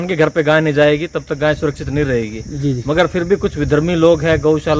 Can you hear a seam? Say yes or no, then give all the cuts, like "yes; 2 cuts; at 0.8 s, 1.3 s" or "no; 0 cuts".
no; 0 cuts